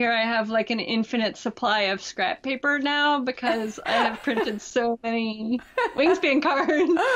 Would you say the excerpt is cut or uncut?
uncut